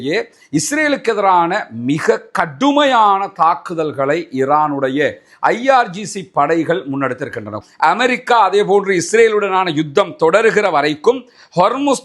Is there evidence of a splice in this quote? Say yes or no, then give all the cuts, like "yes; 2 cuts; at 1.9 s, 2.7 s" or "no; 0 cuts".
yes; 1 cut; at 7.6 s